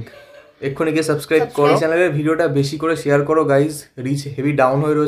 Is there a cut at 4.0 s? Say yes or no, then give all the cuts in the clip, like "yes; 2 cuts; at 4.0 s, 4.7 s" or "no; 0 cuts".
no; 1 cut; at 1.8 s